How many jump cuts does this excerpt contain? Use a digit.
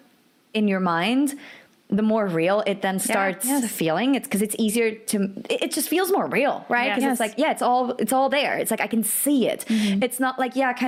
0